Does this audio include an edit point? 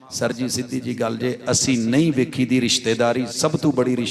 no; 0 cuts

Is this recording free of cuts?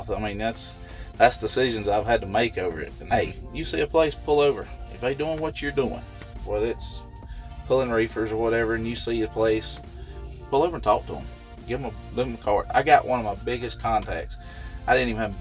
no; 1 cut; at 2.9 s

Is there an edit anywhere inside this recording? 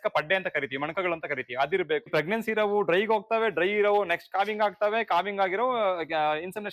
yes; 1 cut; at 2.1 s

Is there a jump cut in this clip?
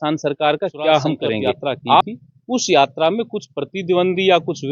yes; 1 cut; at 2.0 s

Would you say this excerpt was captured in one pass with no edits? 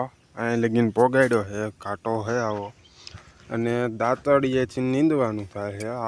yes; 0 cuts

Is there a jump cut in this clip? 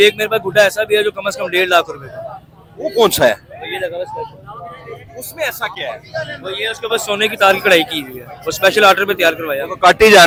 no; 0 cuts

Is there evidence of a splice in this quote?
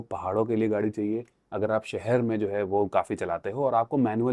no; 0 cuts

